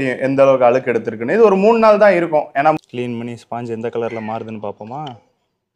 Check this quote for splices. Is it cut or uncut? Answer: cut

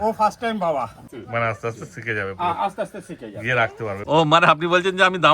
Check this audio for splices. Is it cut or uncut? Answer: cut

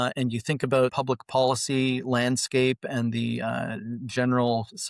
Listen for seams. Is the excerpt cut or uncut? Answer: cut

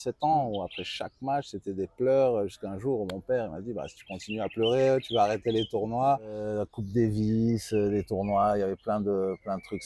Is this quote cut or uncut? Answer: cut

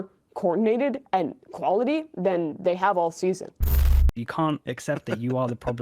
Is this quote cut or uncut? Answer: cut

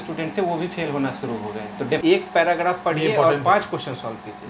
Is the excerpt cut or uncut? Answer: cut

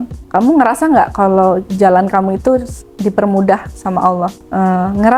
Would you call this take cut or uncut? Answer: uncut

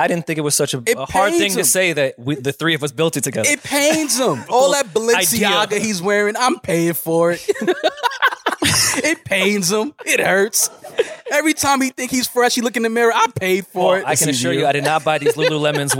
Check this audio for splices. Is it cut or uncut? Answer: cut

